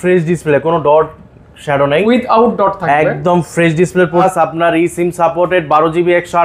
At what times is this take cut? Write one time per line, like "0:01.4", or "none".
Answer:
0:04.2

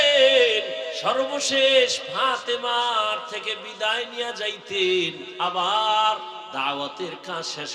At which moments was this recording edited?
0:00.9
0:05.2
0:06.5

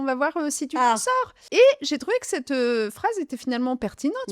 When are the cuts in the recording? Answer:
0:01.4

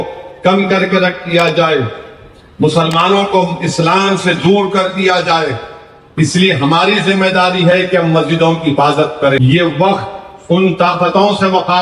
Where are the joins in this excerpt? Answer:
0:09.4

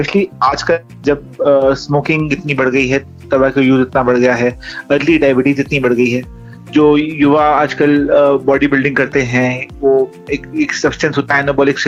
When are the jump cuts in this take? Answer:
none

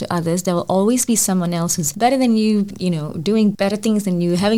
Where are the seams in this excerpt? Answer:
0:01.8
0:02.7
0:03.6

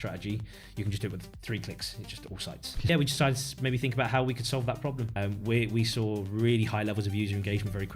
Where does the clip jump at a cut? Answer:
0:02.9
0:05.2

